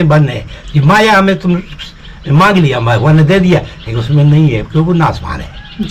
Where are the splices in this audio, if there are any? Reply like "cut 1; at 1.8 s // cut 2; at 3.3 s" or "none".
none